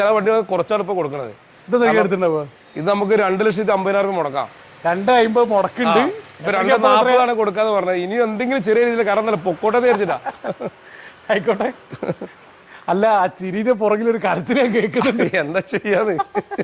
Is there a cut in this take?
no; 0 cuts

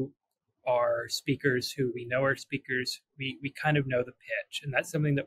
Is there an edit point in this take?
no; 0 cuts

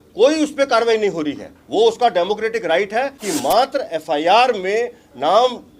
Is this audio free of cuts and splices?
no; 1 cut; at 3.2 s

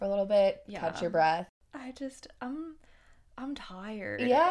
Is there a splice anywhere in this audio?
yes; 1 cut; at 1.6 s

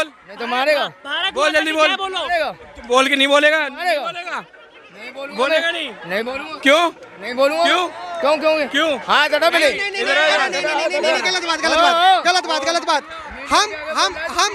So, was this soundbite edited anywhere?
no; 0 cuts

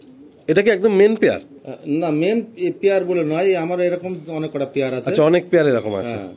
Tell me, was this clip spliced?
no; 0 cuts

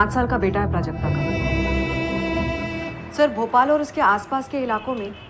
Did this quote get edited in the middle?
yes; 1 cut; at 1.3 s

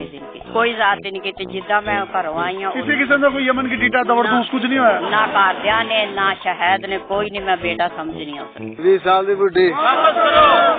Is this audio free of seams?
no; 1 cut; at 8.8 s

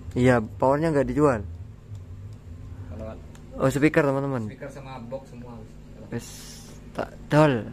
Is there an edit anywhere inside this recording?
no; 0 cuts

